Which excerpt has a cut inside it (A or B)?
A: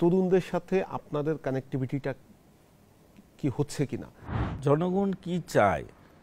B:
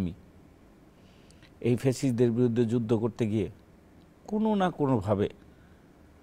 A